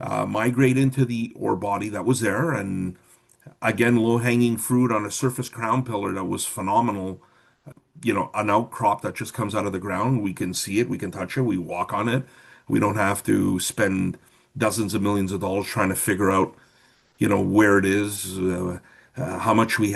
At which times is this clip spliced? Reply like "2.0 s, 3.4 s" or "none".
none